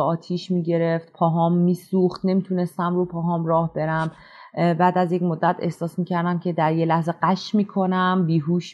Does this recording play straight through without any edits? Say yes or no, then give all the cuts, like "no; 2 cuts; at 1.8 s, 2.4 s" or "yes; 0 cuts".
yes; 0 cuts